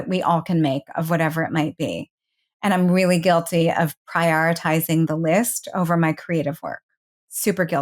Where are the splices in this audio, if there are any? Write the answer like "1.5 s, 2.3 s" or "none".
none